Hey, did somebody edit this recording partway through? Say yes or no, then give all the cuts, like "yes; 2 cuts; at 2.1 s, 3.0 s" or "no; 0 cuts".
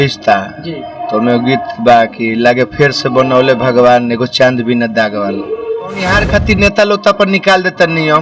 yes; 1 cut; at 6.1 s